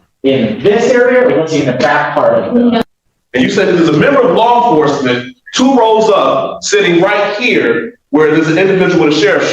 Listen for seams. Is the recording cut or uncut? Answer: cut